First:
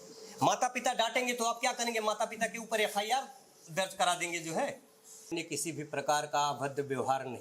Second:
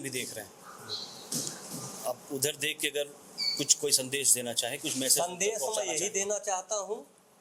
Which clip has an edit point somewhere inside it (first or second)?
first